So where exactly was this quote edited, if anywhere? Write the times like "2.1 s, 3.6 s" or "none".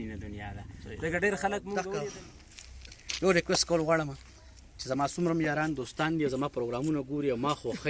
2.1 s